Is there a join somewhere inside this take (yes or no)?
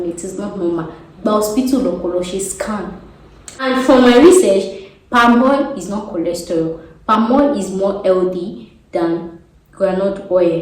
yes